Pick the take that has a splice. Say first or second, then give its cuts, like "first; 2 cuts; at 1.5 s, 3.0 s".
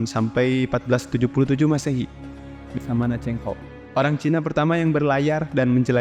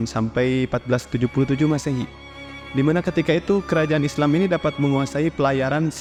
first; 1 cut; at 2.7 s